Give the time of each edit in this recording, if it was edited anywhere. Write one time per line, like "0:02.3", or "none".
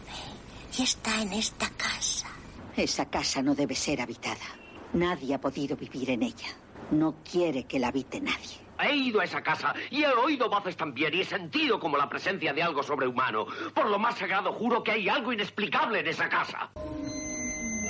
none